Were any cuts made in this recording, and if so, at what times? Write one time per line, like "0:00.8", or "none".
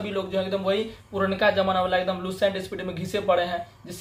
none